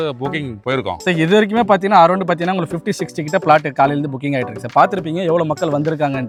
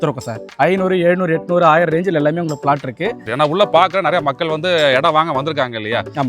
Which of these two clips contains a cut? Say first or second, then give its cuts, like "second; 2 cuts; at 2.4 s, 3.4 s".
second; 1 cut; at 3.2 s